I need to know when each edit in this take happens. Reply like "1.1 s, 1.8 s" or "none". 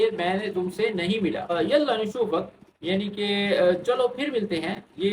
1.5 s